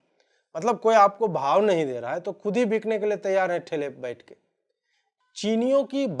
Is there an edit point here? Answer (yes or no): no